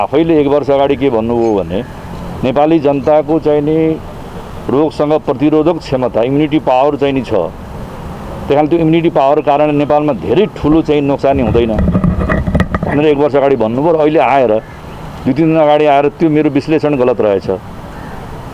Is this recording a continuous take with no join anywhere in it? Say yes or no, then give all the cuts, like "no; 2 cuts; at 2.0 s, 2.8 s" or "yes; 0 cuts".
yes; 0 cuts